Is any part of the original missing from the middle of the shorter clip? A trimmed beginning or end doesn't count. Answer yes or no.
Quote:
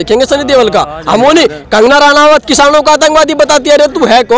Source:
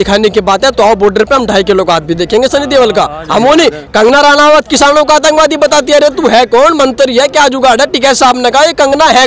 no